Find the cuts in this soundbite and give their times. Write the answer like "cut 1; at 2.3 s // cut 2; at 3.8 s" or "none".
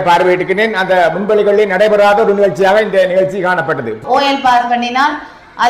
cut 1; at 4.0 s